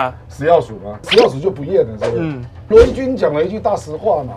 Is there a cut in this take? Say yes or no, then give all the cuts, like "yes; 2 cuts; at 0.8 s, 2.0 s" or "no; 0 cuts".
yes; 2 cuts; at 1.1 s, 2.7 s